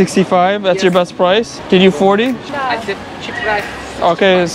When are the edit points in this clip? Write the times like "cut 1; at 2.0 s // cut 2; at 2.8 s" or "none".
cut 1; at 1.6 s // cut 2; at 2.5 s